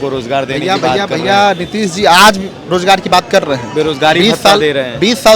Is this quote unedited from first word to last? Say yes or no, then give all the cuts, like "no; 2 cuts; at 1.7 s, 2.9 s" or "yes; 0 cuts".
yes; 0 cuts